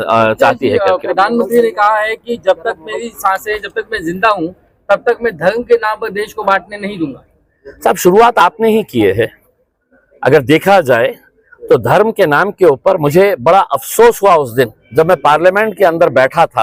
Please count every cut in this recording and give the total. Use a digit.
0